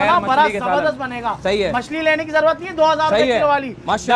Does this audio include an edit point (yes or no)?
no